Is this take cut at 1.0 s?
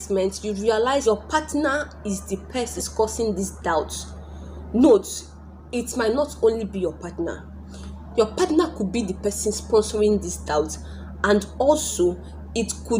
yes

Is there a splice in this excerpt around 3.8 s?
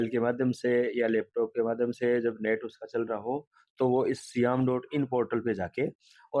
no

